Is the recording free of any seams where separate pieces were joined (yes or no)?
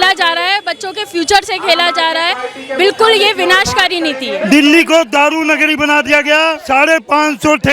no